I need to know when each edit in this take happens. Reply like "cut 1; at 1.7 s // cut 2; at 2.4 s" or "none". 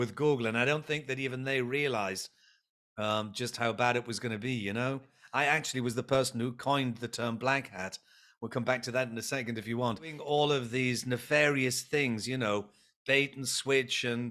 cut 1; at 5.2 s // cut 2; at 10.2 s

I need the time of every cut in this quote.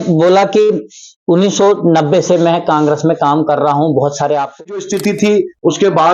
cut 1; at 4.7 s

